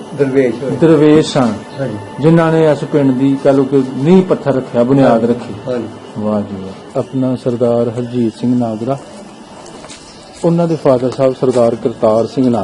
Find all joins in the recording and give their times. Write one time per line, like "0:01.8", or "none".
0:06.9